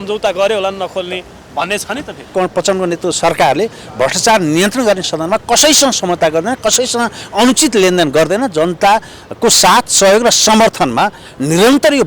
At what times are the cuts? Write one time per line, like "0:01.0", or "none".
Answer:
0:02.3